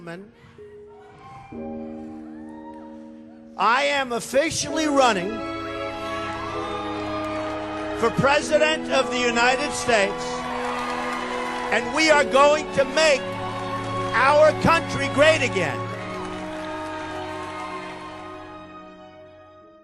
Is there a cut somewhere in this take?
no; 0 cuts

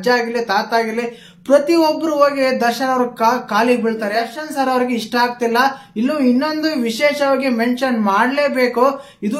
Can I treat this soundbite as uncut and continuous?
no; 1 cut; at 4.4 s

